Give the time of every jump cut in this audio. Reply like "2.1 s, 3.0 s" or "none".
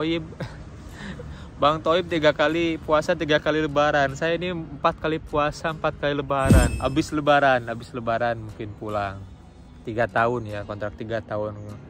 6.7 s